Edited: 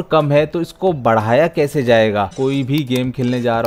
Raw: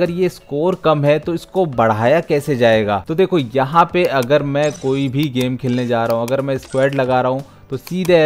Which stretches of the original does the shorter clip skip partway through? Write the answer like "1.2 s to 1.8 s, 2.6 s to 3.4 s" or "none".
3.1 s to 4.8 s